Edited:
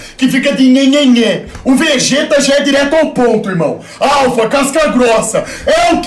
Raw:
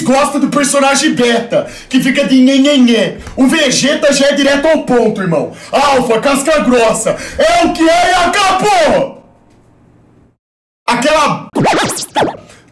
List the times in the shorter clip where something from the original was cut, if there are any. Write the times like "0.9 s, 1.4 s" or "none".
none